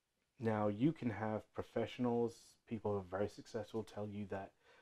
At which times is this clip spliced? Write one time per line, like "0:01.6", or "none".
none